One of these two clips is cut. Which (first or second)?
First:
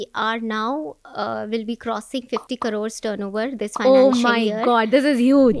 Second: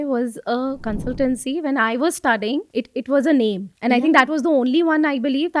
second